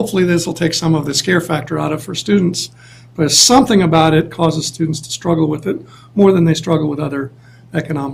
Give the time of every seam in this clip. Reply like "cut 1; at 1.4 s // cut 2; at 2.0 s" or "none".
cut 1; at 1.4 s